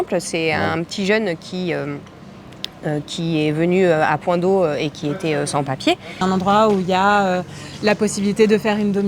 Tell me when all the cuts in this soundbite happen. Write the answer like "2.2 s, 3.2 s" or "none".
6.2 s